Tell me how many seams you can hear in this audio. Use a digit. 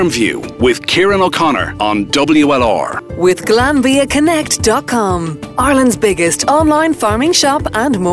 1